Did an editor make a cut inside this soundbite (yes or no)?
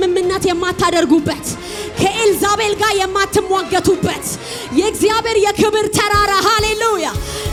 no